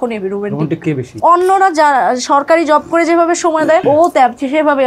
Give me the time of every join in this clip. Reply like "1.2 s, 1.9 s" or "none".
1.1 s, 3.8 s

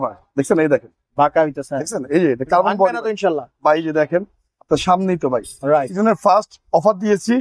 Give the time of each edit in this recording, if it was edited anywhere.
5.9 s

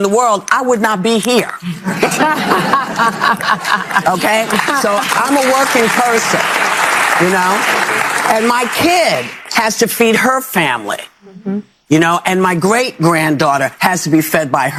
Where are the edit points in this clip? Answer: none

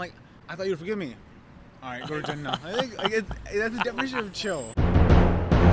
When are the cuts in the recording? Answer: 4.7 s

